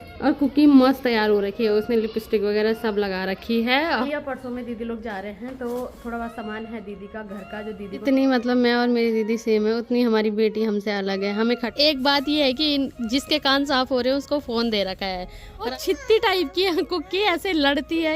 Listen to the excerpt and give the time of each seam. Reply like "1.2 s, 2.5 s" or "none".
4.0 s, 8.0 s, 11.7 s, 15.7 s